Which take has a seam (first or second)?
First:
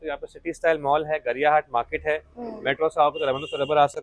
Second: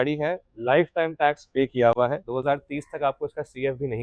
second